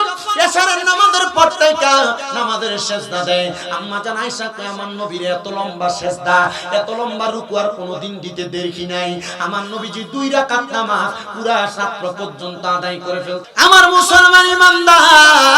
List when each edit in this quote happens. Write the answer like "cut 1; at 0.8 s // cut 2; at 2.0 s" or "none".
cut 1; at 13.5 s